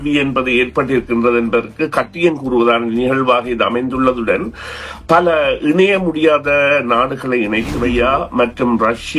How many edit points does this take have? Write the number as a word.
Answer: one